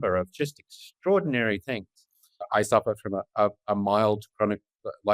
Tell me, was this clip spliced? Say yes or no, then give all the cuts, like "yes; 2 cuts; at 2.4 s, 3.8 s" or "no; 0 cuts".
no; 0 cuts